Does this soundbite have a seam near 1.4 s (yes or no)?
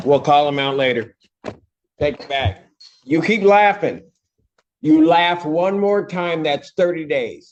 no